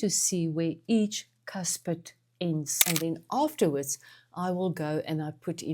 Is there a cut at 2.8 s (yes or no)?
yes